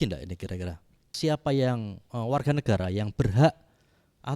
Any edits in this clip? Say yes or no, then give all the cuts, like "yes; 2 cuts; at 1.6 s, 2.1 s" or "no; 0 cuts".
yes; 1 cut; at 1.1 s